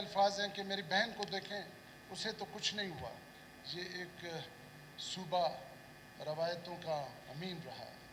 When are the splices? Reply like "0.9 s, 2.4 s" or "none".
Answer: 3.4 s